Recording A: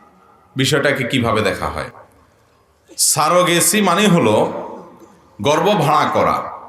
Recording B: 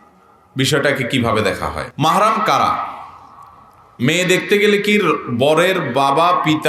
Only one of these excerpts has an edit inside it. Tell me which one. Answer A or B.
B